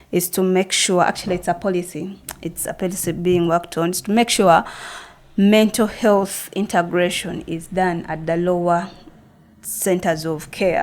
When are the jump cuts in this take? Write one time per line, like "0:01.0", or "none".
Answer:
none